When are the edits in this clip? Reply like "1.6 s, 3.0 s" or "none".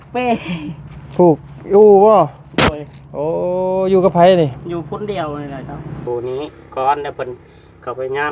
6.1 s